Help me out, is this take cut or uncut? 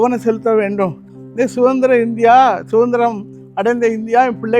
cut